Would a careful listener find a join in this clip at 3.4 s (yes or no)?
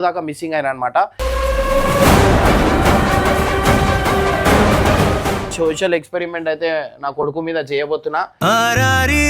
no